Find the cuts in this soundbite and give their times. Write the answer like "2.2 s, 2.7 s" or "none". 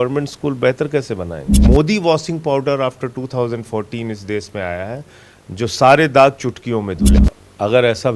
1.6 s, 7.1 s